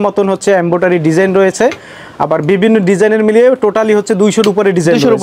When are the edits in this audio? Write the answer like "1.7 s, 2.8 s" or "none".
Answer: none